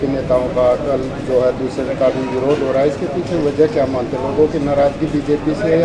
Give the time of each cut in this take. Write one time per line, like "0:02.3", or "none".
none